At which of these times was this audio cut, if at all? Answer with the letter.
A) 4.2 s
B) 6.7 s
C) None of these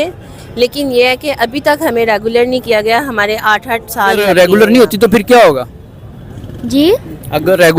A